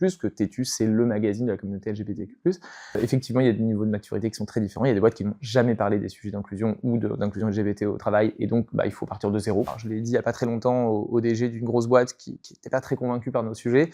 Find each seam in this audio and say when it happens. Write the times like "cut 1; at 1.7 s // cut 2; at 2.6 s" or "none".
cut 1; at 3.0 s // cut 2; at 9.8 s